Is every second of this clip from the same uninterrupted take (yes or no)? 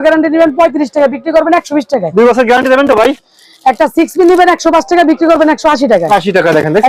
yes